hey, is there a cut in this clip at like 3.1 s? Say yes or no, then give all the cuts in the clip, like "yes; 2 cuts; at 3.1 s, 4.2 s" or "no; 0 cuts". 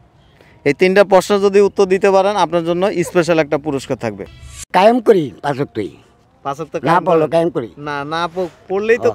no; 1 cut; at 4.7 s